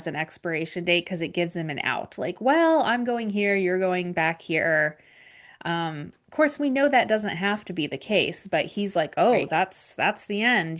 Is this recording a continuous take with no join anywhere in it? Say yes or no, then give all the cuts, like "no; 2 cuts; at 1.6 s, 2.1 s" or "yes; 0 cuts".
yes; 0 cuts